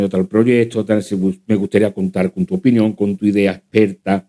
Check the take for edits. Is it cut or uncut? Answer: uncut